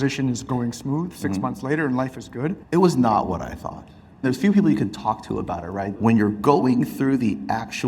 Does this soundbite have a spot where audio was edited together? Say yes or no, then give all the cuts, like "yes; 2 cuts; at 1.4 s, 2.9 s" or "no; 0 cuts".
yes; 3 cuts; at 2.6 s, 4.2 s, 5.9 s